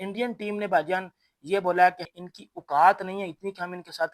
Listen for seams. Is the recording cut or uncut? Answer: cut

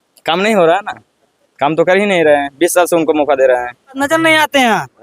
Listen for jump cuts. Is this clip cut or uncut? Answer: cut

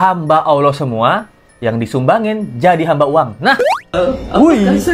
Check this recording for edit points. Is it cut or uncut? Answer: cut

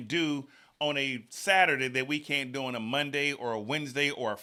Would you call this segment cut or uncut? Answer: uncut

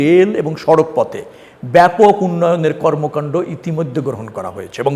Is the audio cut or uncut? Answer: uncut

